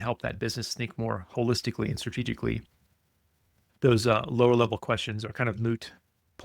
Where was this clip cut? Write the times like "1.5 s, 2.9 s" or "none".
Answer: 5.3 s

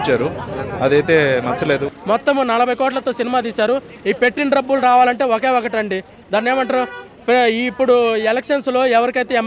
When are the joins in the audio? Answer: 1.9 s

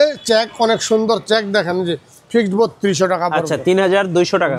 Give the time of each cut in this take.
none

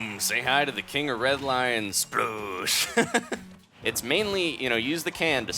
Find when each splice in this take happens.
3.6 s

